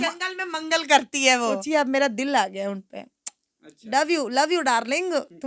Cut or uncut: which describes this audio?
cut